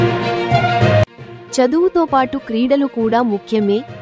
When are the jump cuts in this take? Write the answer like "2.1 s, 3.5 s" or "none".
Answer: 1.1 s